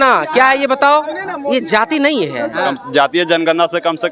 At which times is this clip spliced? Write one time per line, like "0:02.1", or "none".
0:02.8